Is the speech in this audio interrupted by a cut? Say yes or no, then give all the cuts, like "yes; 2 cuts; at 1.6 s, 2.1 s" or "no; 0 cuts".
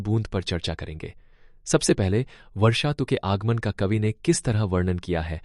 no; 0 cuts